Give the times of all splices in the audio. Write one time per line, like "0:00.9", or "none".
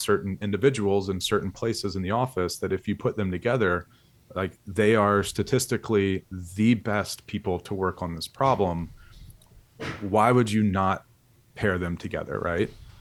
none